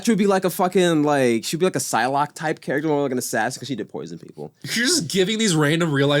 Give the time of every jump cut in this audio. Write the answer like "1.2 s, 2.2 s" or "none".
4.7 s